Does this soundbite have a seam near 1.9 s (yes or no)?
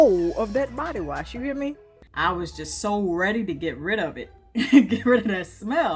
yes